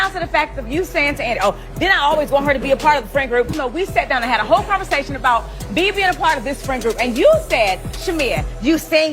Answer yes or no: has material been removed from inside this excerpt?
yes